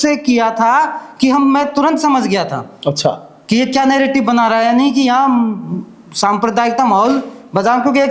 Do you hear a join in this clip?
no; 0 cuts

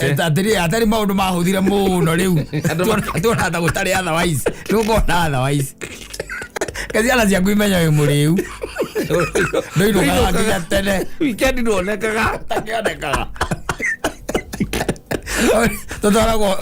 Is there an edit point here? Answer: no; 0 cuts

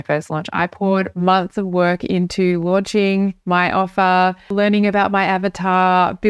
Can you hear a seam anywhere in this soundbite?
yes; 1 cut; at 4.5 s

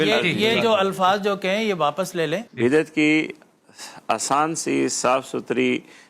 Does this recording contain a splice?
yes; 1 cut; at 2.5 s

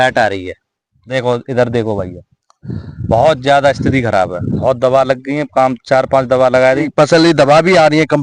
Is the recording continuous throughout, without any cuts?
no; 2 cuts; at 4.5 s, 6.9 s

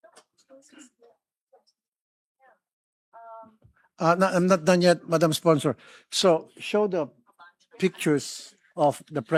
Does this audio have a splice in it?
no; 0 cuts

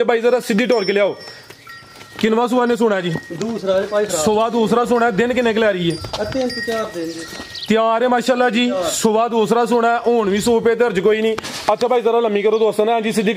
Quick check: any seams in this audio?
no; 0 cuts

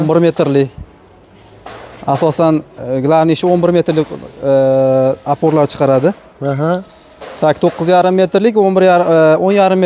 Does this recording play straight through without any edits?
yes; 0 cuts

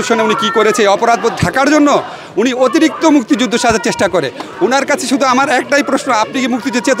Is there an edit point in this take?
no; 0 cuts

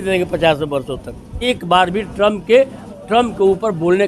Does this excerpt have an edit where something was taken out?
yes; 1 cut; at 1.5 s

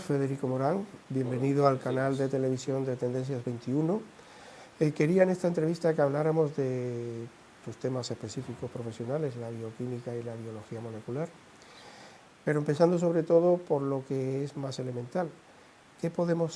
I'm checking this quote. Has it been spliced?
no; 0 cuts

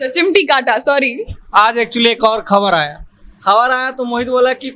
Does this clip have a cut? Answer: yes; 1 cut; at 1.5 s

